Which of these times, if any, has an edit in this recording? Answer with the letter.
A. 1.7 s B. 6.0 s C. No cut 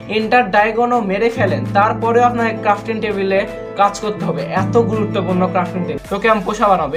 B